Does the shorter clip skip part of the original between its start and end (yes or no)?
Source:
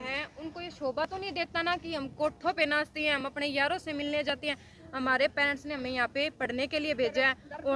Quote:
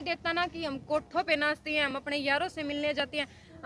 no